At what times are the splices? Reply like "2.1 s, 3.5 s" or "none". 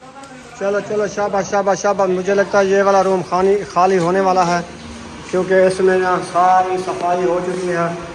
none